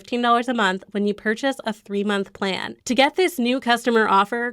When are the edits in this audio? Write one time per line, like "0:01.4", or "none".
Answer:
0:02.7

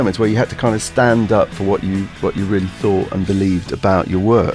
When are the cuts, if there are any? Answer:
none

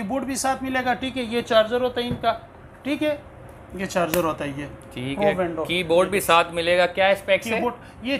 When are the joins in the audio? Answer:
none

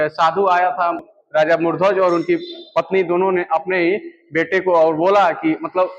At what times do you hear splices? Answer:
0:01.1

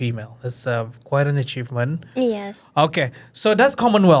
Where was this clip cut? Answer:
none

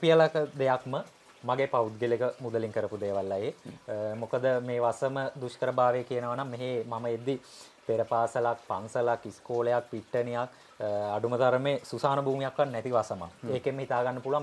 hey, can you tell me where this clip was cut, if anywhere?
none

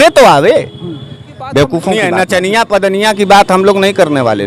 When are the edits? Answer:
0:02.0

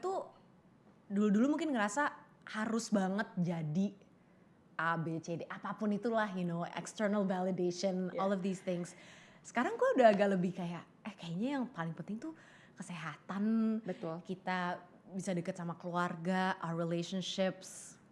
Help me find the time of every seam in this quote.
none

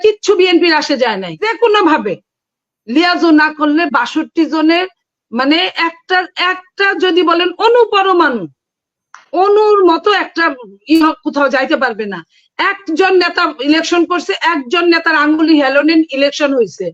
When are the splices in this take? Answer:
0:01.4

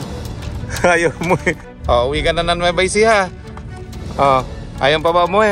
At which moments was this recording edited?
0:01.7

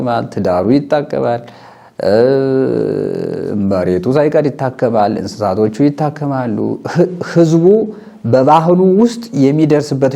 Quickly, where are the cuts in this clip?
none

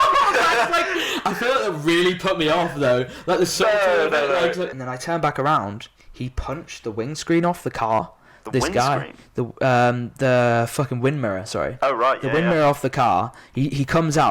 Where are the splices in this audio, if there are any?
0:04.7

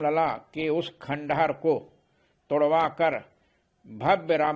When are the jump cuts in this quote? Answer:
none

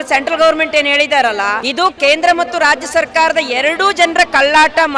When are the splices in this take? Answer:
0:01.6

